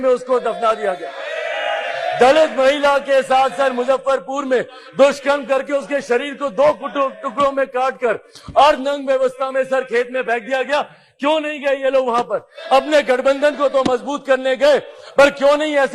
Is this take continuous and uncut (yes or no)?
yes